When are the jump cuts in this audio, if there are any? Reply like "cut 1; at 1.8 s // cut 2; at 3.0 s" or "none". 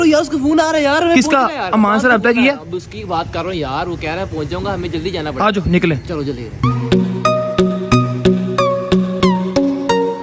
none

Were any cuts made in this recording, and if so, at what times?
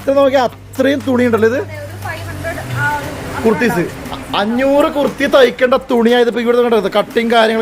none

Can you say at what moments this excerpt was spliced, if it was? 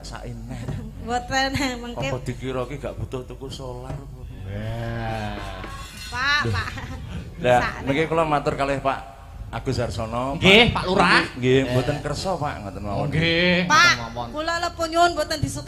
cut 1; at 5.8 s

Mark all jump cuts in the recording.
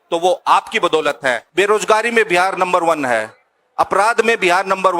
cut 1; at 1.4 s

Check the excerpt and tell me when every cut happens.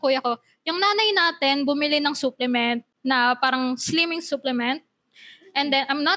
none

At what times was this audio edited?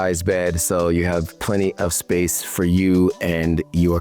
none

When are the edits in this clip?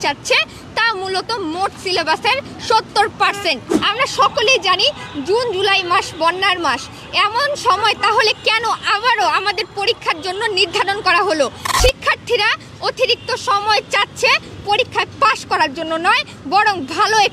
cut 1; at 3.8 s // cut 2; at 11.7 s

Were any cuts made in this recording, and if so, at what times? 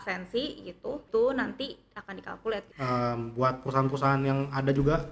cut 1; at 1.1 s // cut 2; at 2.7 s

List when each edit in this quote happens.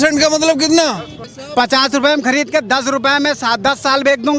cut 1; at 1.3 s

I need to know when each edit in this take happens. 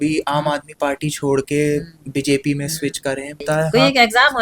cut 1; at 3.4 s

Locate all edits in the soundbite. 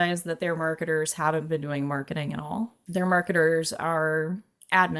cut 1; at 2.8 s

